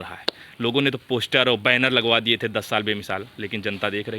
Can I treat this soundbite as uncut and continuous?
yes; 0 cuts

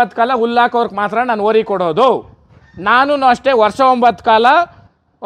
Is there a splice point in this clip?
no; 0 cuts

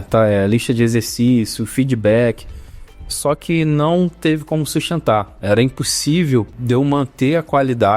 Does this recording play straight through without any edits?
no; 1 cut; at 6.6 s

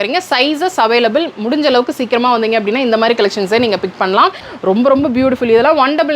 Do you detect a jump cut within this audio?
yes; 1 cut; at 4.4 s

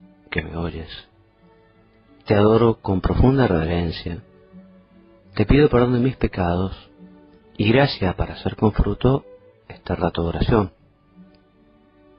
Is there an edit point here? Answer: yes; 1 cut; at 4.2 s

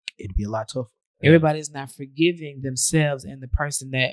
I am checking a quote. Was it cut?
yes; 1 cut; at 1.0 s

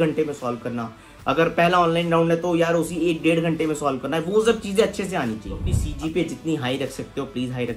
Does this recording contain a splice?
yes; 1 cut; at 5.8 s

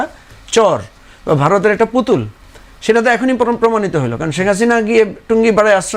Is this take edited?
no; 0 cuts

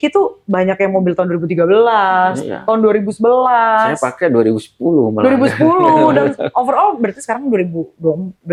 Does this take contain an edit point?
no; 0 cuts

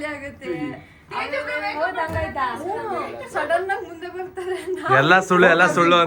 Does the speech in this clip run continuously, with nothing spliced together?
yes; 0 cuts

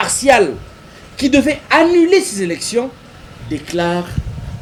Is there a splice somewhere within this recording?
no; 0 cuts

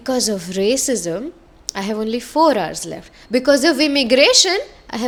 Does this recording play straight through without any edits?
yes; 0 cuts

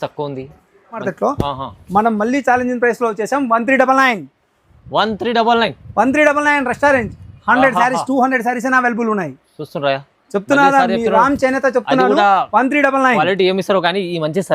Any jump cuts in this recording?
yes; 1 cut; at 1.1 s

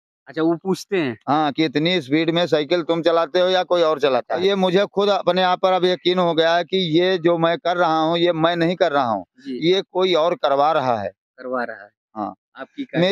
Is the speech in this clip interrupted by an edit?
yes; 1 cut; at 4.3 s

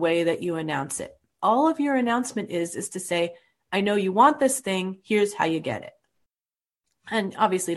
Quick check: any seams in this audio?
yes; 1 cut; at 1.3 s

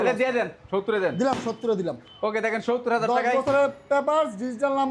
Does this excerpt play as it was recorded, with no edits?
yes; 0 cuts

